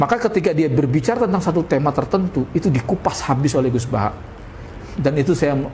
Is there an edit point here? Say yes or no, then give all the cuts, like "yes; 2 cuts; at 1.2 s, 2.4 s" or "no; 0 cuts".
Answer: no; 0 cuts